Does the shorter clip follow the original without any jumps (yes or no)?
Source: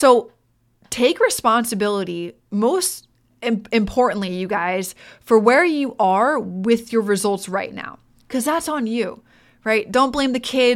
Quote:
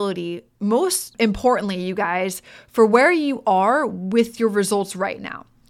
no